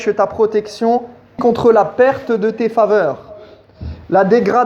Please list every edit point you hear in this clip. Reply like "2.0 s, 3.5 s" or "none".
1.4 s